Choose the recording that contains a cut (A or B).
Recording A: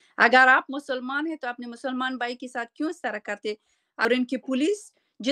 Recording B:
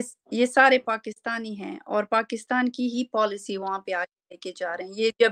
A